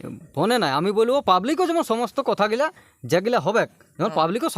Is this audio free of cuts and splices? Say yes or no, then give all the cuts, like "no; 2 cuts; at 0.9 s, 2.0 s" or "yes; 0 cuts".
yes; 0 cuts